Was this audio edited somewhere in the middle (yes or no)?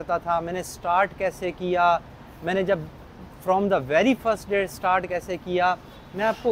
no